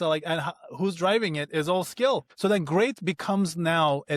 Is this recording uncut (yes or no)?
no